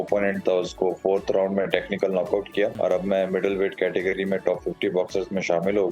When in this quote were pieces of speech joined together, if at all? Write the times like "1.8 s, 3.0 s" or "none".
2.7 s